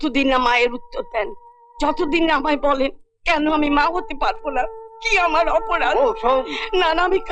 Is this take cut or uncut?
uncut